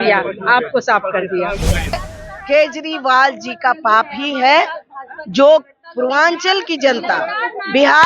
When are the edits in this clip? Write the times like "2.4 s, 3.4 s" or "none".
2.0 s

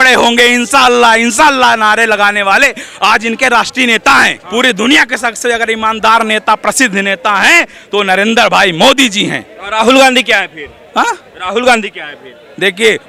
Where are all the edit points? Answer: 4.4 s

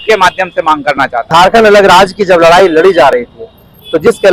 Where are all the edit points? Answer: none

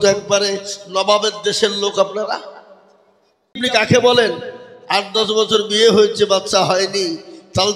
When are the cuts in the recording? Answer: 3.6 s

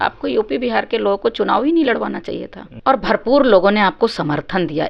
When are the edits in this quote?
none

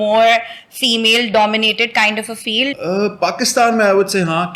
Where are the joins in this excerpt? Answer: none

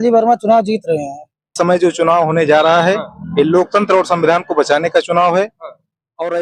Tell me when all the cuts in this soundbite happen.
1.5 s

